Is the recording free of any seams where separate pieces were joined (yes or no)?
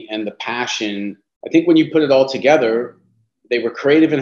no